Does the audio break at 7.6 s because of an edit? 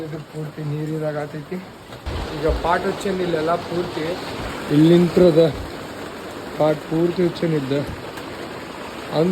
no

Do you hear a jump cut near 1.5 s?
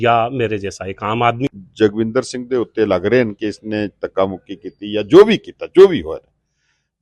yes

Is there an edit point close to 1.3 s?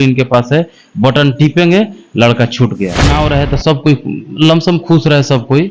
no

